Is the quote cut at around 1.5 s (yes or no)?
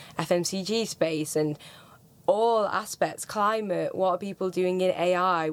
no